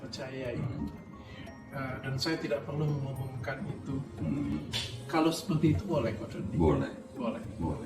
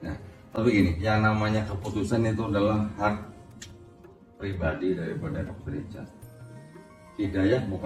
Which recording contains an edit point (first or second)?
first